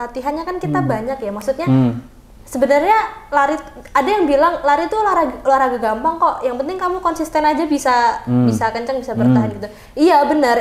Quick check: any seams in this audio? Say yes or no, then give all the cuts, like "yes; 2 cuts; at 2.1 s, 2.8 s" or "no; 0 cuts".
no; 0 cuts